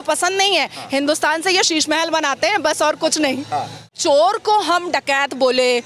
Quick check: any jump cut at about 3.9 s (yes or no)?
yes